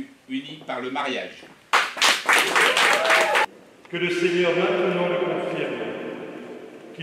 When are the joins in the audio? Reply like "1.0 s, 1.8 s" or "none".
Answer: 3.5 s

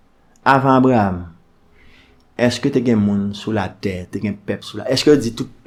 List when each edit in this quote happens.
none

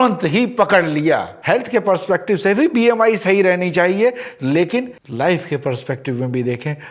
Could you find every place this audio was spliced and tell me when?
1.3 s

